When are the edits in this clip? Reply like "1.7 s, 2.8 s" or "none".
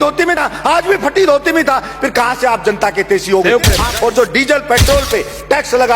3.9 s